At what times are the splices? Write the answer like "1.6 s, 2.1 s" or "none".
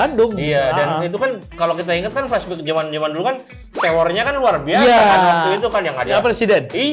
1.5 s